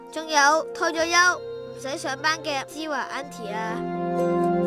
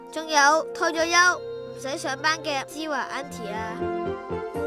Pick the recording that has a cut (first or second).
second